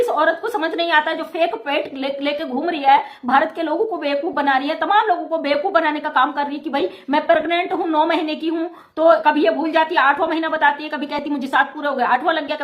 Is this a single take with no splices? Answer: yes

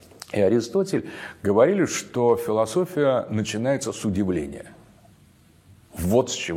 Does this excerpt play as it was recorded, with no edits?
yes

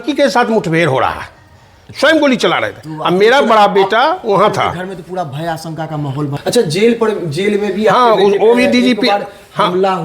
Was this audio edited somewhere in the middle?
yes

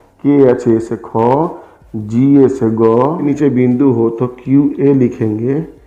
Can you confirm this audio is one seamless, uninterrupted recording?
no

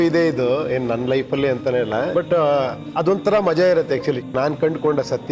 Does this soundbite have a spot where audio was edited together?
yes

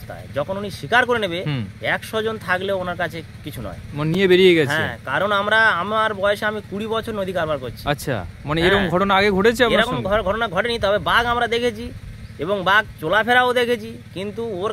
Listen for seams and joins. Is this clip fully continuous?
yes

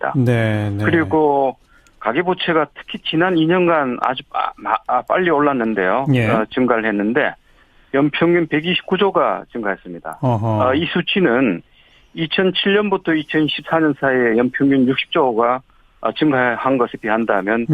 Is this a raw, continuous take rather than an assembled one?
no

